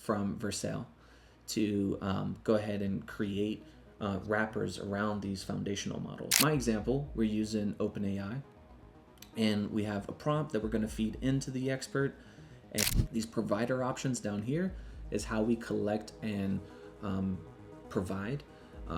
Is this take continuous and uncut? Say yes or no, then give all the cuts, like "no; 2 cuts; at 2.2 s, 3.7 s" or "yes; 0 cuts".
no; 2 cuts; at 6.3 s, 12.8 s